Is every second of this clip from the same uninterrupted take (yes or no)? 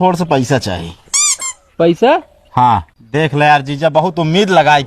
no